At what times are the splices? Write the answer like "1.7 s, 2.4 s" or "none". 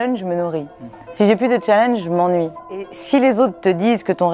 2.8 s